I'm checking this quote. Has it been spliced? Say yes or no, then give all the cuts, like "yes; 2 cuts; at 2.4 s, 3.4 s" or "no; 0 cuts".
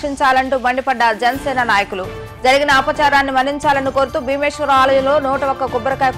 no; 0 cuts